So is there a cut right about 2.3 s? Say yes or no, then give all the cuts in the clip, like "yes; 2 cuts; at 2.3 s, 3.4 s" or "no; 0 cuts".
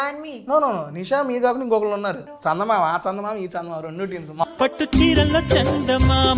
yes; 2 cuts; at 2.3 s, 4.4 s